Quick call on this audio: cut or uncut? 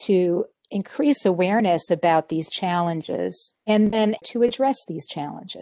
cut